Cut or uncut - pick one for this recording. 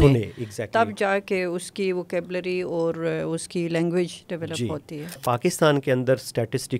cut